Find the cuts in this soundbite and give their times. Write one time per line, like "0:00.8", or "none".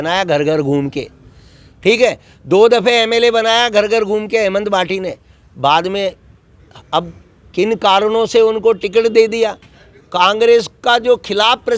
none